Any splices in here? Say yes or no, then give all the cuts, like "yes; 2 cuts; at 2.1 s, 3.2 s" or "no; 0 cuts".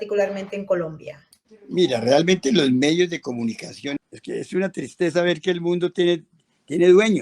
yes; 1 cut; at 4.0 s